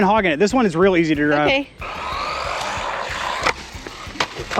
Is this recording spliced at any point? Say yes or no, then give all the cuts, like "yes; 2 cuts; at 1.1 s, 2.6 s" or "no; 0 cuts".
yes; 1 cut; at 1.8 s